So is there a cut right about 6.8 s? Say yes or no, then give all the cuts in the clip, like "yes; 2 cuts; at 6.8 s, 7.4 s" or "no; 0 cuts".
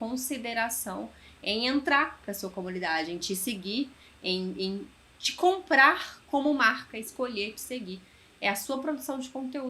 yes; 1 cut; at 6.8 s